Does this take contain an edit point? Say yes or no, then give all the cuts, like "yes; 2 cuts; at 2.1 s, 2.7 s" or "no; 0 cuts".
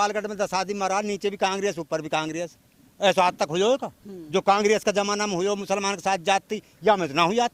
no; 0 cuts